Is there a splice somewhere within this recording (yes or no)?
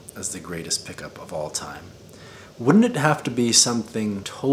no